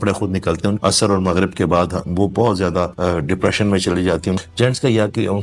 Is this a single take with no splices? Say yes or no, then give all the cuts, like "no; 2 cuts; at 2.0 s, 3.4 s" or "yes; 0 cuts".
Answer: no; 3 cuts; at 0.8 s, 2.9 s, 4.4 s